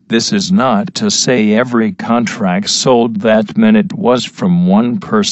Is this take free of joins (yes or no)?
no